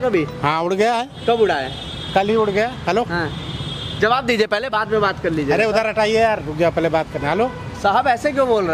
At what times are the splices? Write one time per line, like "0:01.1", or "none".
none